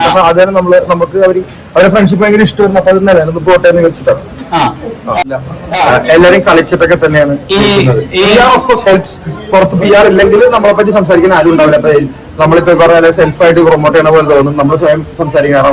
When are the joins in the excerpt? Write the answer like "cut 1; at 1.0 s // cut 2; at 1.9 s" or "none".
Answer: cut 1; at 5.2 s